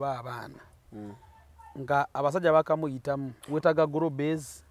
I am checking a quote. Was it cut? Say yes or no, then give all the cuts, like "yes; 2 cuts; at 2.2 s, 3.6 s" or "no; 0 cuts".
yes; 1 cut; at 3.3 s